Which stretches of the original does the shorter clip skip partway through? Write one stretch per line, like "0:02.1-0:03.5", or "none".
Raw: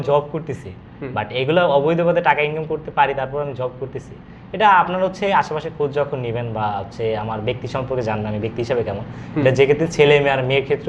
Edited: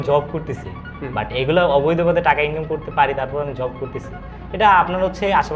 none